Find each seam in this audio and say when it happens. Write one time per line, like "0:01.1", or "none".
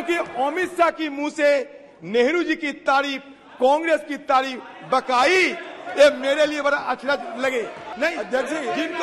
0:07.8